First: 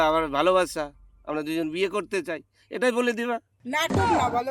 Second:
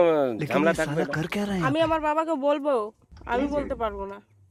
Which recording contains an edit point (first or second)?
first